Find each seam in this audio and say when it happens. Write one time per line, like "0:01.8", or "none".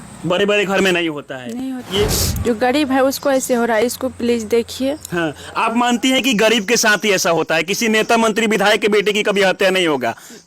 0:02.1